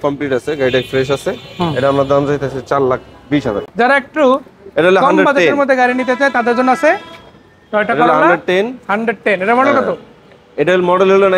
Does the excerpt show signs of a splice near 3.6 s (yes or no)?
yes